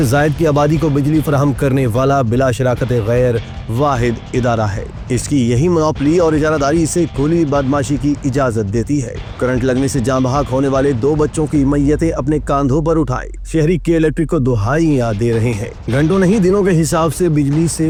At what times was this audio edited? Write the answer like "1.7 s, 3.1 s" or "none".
none